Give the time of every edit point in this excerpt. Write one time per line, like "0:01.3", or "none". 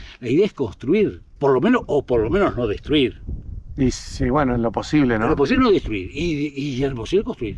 none